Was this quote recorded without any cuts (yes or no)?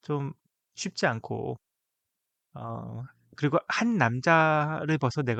yes